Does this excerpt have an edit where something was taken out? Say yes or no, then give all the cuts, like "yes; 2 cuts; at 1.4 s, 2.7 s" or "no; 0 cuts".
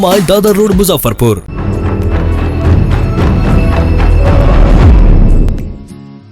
yes; 1 cut; at 1.5 s